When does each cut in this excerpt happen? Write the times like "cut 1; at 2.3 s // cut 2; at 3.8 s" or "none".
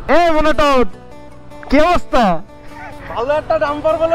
none